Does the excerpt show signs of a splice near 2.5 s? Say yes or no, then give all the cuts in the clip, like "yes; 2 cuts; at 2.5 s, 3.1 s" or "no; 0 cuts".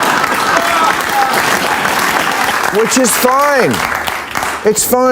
yes; 1 cut; at 2.5 s